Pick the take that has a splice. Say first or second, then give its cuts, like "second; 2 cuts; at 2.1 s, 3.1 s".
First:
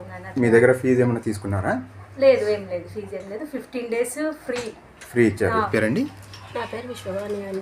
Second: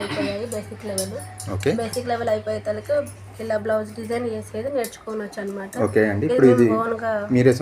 first; 1 cut; at 5.7 s